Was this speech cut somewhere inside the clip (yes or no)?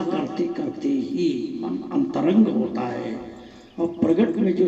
yes